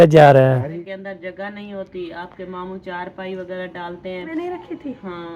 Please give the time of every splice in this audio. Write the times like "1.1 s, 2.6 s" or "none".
0.8 s, 4.3 s